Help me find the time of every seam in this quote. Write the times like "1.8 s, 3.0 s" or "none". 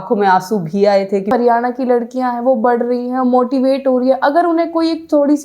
1.3 s